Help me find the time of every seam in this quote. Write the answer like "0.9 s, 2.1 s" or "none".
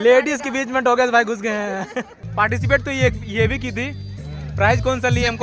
2.2 s